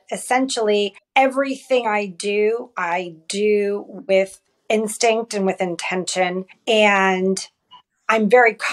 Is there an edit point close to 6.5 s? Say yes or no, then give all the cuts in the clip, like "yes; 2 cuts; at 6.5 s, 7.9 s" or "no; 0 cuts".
yes; 2 cuts; at 1.0 s, 6.5 s